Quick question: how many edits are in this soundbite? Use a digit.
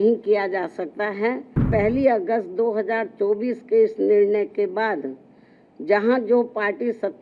1